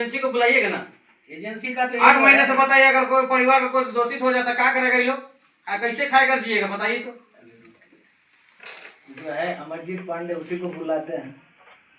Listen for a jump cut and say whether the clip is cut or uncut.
uncut